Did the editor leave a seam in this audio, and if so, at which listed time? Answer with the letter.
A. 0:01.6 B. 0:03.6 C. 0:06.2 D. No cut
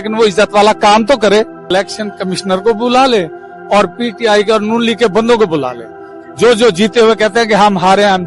A